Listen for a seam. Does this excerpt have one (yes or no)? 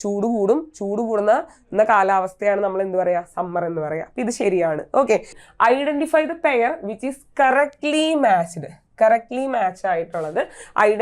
yes